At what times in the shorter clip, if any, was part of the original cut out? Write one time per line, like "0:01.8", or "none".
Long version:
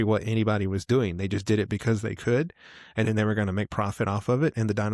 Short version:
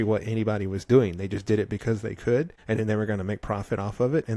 0:02.6